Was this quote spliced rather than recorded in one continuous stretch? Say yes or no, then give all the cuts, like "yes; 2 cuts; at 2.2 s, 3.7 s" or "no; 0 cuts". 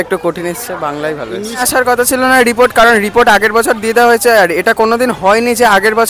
yes; 1 cut; at 1.6 s